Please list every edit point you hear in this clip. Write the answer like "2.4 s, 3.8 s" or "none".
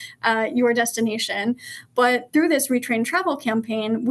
none